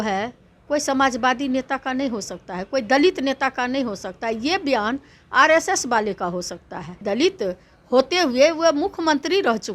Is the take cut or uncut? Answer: cut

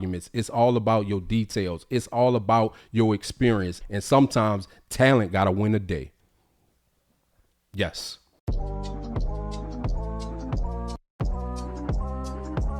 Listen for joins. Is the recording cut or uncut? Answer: cut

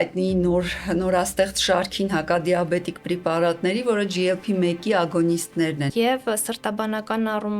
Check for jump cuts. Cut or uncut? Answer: cut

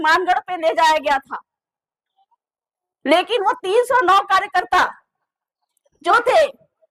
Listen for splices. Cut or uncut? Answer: uncut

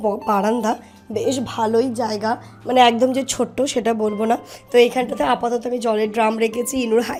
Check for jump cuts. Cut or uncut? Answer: uncut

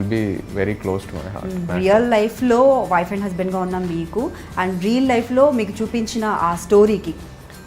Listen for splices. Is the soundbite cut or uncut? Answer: cut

